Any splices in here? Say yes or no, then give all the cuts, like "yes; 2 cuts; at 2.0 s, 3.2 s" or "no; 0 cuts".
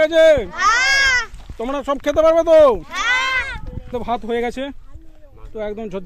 yes; 1 cut; at 3.9 s